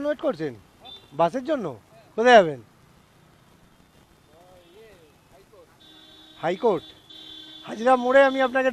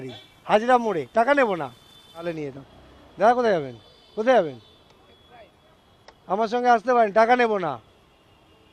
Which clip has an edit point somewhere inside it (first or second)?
second